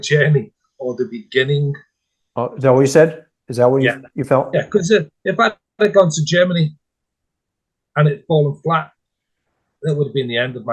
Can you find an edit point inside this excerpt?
no; 0 cuts

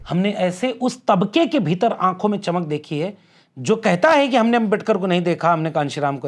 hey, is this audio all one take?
yes; 0 cuts

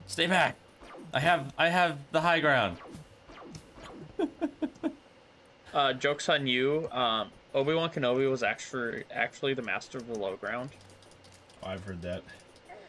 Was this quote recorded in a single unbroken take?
yes; 0 cuts

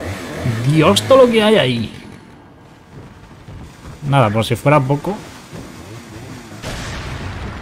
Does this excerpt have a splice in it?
no; 0 cuts

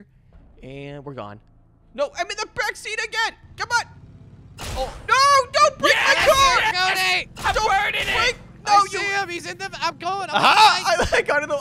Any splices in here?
no; 0 cuts

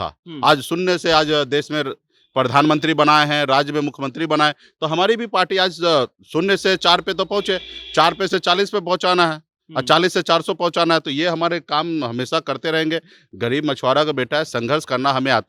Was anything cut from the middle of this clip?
no; 0 cuts

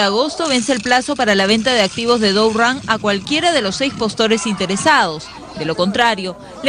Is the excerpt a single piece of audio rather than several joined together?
no; 1 cut; at 5.3 s

